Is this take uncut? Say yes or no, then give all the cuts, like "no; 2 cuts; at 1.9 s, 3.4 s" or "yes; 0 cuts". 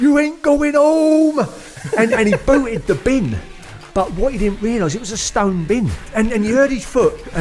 no; 1 cut; at 6.0 s